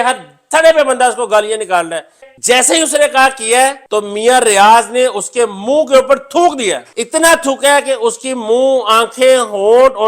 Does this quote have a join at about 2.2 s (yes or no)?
yes